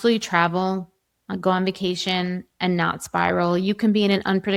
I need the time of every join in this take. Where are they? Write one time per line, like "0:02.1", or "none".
none